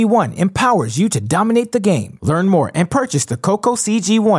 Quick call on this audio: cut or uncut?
uncut